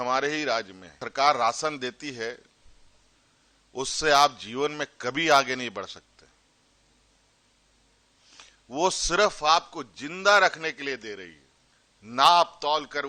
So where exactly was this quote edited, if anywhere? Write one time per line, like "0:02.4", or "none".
0:01.0